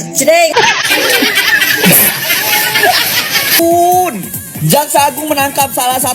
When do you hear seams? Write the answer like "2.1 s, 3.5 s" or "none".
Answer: 3.4 s